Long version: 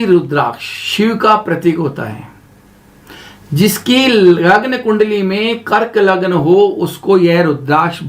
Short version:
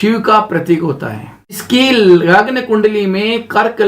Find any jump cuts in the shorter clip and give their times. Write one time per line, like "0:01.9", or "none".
0:01.6